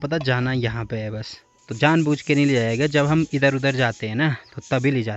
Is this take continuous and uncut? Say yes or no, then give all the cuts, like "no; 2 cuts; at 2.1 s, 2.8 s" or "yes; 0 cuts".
yes; 0 cuts